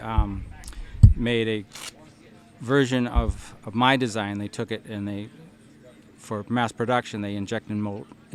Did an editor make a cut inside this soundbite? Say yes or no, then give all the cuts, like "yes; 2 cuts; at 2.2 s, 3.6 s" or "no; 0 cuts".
no; 0 cuts